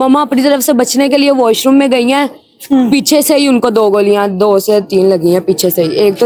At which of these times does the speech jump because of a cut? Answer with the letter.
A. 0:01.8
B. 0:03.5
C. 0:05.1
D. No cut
D